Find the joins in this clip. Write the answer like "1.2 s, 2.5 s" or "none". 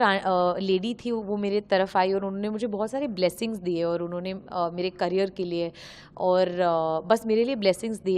none